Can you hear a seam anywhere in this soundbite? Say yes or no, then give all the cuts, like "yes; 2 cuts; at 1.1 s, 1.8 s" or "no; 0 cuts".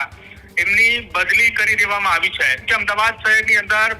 yes; 1 cut; at 2.6 s